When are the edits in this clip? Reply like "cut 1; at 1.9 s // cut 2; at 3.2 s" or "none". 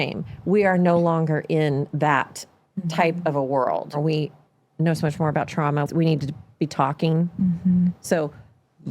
cut 1; at 4.0 s // cut 2; at 5.9 s